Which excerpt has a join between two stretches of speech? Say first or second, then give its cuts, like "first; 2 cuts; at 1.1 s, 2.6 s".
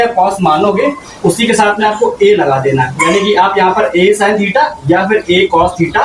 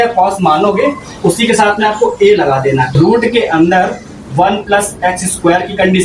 second; 1 cut; at 2.9 s